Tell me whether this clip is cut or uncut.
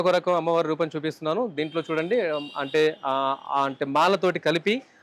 uncut